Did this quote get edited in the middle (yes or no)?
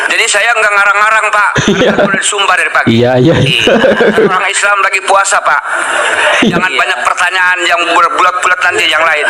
no